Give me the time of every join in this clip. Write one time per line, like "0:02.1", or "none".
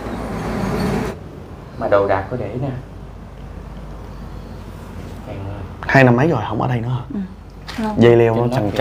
0:01.1